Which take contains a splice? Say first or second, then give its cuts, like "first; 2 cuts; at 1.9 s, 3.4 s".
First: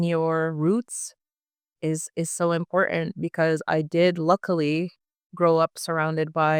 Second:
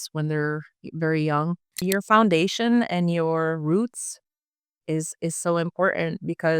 second; 1 cut; at 1.8 s